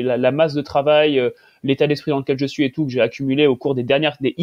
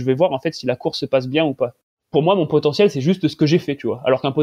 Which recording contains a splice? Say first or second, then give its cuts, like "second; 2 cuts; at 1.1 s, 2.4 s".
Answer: second; 1 cut; at 1.8 s